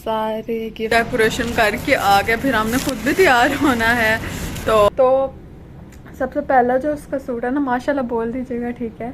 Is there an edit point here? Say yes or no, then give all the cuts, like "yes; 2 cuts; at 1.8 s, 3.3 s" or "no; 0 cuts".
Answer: yes; 2 cuts; at 0.9 s, 4.9 s